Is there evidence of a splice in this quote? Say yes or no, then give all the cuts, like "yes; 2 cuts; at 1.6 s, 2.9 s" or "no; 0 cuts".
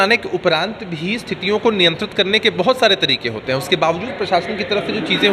no; 0 cuts